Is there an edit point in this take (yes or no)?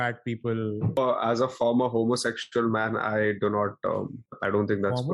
yes